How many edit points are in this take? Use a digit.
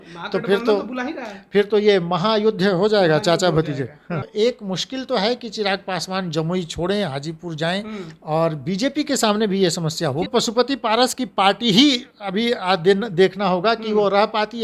2